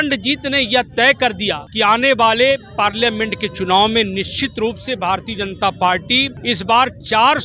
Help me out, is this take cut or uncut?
cut